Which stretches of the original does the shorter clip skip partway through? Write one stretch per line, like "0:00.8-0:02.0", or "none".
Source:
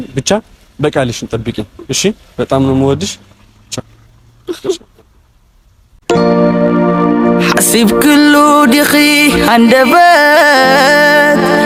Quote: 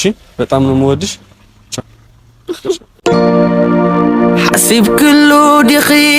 0:04.9-0:05.9